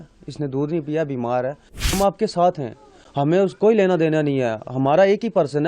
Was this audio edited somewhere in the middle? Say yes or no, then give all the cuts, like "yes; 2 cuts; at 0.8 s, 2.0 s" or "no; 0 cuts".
yes; 1 cut; at 1.9 s